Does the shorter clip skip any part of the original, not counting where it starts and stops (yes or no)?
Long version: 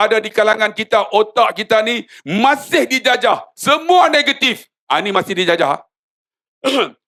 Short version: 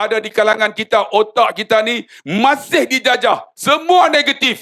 no